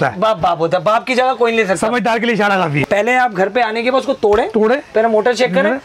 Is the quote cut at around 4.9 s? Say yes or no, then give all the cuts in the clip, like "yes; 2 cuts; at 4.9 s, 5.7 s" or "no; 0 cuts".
no; 1 cut; at 2.8 s